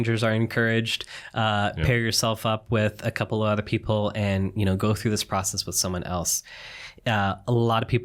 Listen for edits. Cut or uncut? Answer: uncut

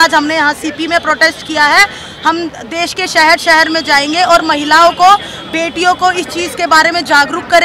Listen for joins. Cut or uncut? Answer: uncut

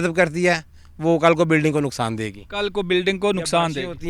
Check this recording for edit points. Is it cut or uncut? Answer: uncut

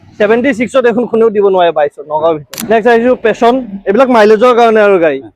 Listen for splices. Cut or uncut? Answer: cut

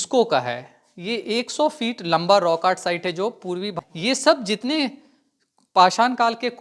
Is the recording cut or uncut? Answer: cut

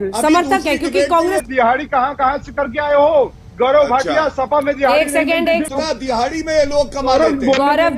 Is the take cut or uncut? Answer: cut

